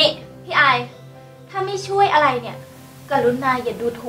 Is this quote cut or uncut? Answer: uncut